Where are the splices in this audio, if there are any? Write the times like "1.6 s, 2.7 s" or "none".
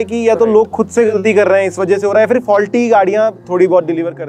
none